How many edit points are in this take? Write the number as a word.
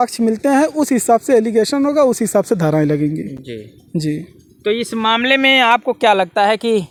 zero